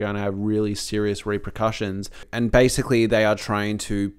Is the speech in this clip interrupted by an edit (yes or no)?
yes